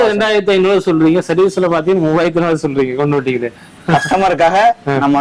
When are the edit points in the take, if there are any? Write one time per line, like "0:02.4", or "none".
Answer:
none

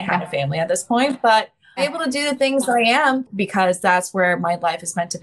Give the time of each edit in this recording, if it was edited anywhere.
0:01.8
0:03.2

